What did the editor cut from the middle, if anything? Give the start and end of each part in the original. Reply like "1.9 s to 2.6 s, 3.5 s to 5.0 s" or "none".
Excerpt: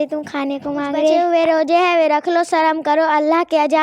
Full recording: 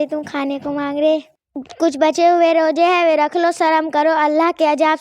1.2 s to 2.2 s